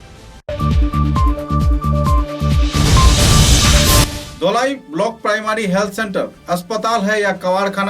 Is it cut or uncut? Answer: cut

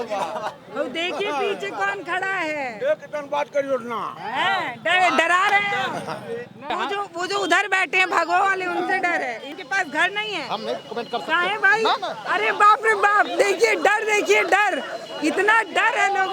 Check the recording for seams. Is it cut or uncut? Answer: cut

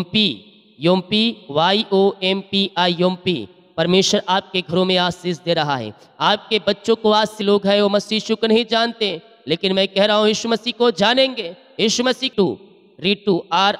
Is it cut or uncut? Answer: cut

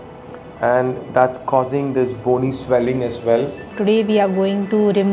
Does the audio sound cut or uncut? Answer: cut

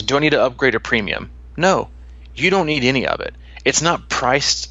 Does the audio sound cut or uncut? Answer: uncut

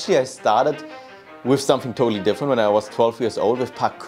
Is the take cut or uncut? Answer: uncut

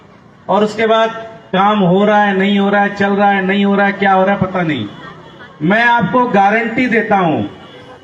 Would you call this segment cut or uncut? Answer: uncut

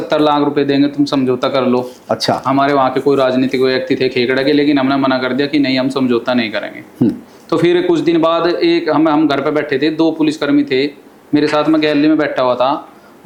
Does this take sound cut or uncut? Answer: uncut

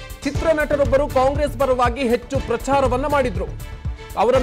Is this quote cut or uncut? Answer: cut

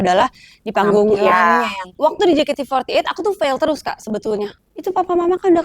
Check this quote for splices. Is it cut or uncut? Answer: cut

